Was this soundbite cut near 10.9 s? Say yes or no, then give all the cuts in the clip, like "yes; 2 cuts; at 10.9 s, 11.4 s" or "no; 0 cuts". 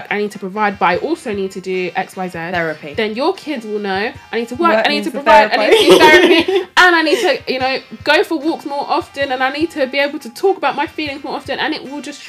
no; 0 cuts